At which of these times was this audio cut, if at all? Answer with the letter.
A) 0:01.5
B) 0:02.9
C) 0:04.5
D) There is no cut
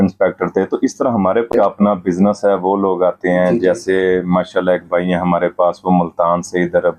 A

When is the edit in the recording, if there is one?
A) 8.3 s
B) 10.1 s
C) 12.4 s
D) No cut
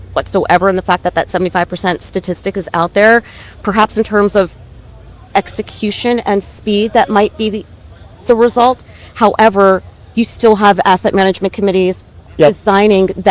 C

